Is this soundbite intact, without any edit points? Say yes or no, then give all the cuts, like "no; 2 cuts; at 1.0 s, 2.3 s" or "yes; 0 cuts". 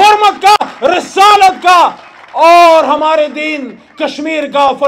yes; 0 cuts